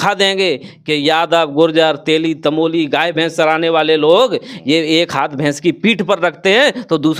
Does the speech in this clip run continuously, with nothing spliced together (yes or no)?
yes